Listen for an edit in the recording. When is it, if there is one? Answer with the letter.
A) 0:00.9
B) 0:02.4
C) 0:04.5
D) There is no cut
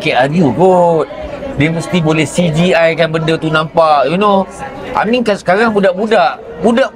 D